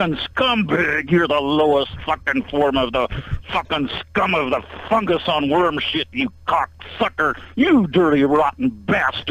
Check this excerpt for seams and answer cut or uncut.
uncut